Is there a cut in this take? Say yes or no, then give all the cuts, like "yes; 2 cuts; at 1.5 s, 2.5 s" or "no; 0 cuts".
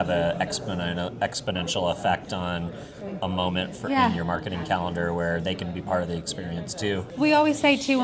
yes; 1 cut; at 7.1 s